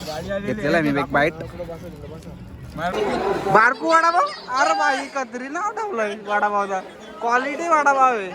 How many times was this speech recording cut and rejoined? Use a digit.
1